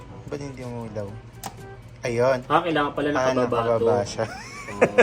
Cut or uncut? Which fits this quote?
uncut